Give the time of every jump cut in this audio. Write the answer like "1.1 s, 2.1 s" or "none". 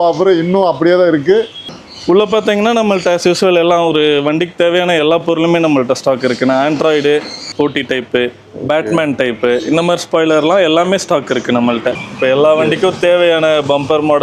1.7 s, 7.5 s, 12.0 s